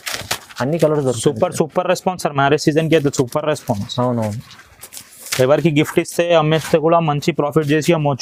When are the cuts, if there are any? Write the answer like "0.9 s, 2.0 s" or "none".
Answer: none